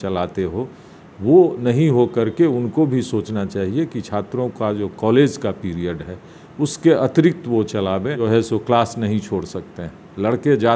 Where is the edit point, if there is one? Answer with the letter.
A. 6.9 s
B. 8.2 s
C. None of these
B